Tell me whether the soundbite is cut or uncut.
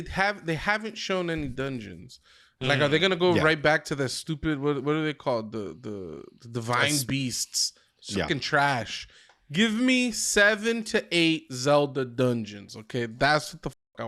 uncut